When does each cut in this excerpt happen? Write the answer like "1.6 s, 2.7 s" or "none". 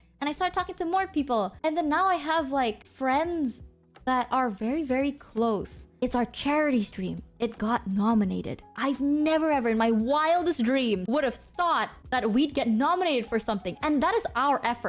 5.9 s, 11.0 s